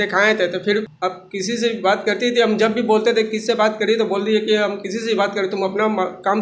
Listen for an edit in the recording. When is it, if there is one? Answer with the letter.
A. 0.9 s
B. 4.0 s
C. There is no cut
A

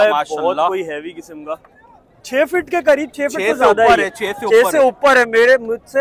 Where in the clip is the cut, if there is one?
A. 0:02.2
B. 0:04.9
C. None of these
A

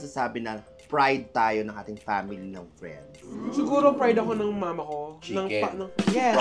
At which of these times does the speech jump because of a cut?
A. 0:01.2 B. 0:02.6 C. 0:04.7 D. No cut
D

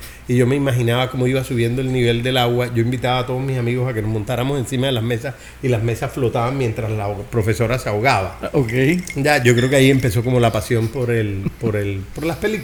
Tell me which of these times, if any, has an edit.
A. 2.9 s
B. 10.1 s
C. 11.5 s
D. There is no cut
D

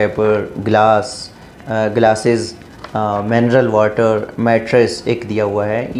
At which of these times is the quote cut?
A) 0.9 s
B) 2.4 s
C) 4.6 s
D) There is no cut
D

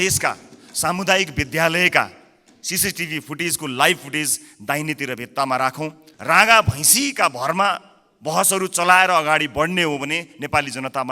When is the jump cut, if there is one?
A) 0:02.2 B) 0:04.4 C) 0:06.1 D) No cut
C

